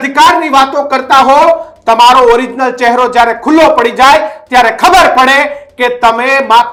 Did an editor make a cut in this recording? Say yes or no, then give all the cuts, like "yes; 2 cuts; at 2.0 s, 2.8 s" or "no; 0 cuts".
no; 0 cuts